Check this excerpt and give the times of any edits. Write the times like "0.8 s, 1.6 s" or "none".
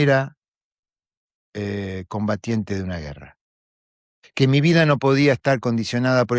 none